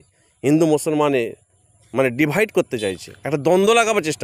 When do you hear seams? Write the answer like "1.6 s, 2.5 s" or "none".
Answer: 3.1 s